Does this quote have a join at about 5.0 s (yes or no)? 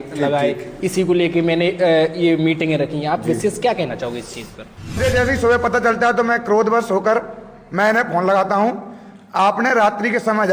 yes